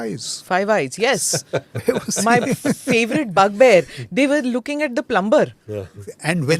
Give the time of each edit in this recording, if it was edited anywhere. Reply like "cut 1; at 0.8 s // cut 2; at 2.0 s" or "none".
none